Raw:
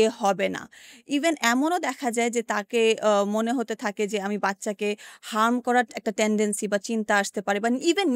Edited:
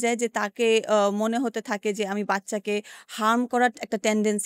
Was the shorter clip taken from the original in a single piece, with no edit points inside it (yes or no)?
yes